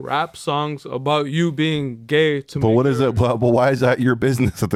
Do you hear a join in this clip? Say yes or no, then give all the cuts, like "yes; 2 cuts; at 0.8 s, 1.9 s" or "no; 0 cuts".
no; 0 cuts